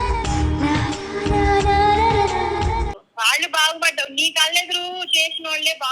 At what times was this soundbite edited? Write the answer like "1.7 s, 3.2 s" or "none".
3.1 s